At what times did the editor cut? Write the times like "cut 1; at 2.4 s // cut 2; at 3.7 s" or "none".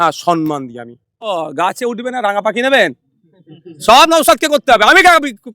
cut 1; at 1.3 s